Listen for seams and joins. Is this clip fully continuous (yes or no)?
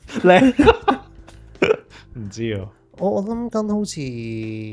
yes